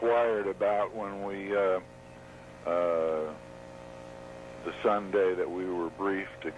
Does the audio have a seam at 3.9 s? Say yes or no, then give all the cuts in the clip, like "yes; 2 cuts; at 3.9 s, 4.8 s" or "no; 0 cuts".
yes; 1 cut; at 3.9 s